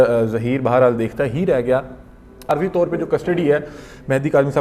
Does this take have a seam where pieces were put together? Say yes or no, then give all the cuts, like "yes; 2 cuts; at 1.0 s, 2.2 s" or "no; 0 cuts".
yes; 1 cut; at 2.5 s